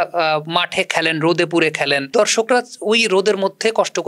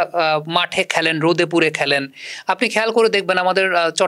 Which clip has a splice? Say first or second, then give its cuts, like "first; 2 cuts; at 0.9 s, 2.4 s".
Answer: first; 1 cut; at 2.1 s